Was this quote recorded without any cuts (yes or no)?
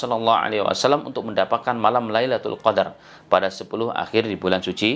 yes